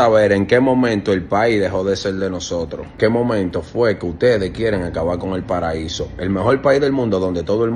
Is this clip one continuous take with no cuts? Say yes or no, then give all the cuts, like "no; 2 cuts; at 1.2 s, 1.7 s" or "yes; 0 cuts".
no; 1 cut; at 3.0 s